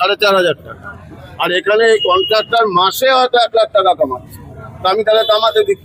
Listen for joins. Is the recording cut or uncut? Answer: uncut